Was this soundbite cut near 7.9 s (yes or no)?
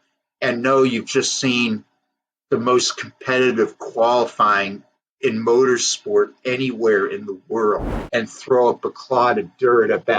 yes